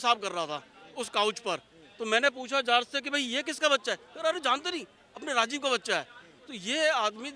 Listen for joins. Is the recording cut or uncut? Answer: uncut